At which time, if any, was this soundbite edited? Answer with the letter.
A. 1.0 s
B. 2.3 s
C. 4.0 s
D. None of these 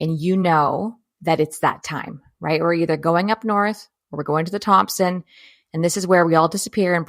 A